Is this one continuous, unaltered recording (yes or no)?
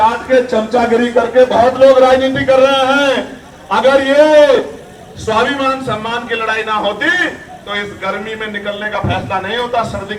yes